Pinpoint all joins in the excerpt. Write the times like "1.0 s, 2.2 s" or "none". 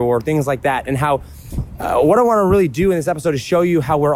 none

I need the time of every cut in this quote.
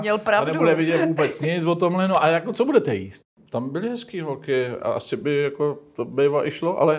3.1 s

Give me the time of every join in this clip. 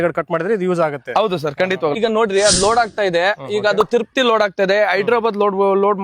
2.0 s

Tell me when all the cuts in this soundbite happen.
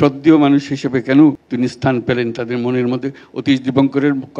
1.4 s

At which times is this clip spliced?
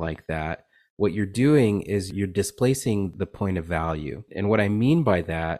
2.1 s, 3.1 s, 4.3 s

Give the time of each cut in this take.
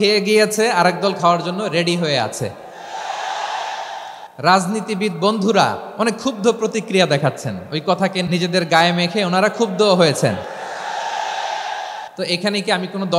4.2 s, 5.8 s, 8.3 s, 12.1 s

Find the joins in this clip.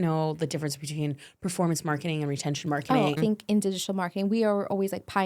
3.2 s

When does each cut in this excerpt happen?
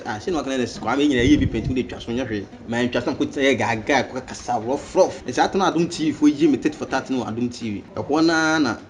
2.5 s, 5.2 s, 7.9 s

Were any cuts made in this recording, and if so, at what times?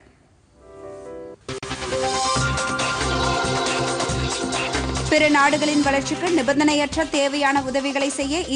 1.4 s

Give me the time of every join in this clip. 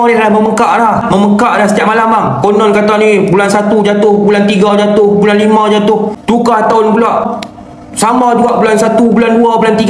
1.0 s, 6.1 s, 7.3 s

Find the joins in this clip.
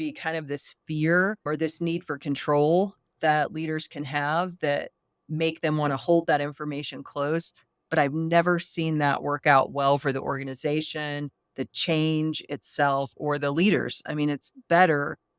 1.4 s

